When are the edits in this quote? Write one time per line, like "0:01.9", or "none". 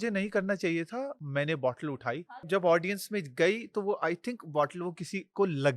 0:01.2
0:02.2